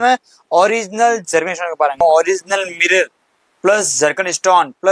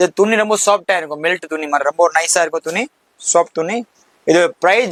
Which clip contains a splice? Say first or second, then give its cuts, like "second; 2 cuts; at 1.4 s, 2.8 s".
first; 1 cut; at 2.0 s